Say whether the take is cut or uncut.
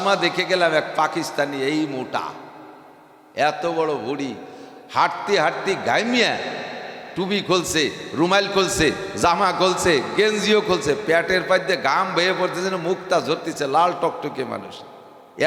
uncut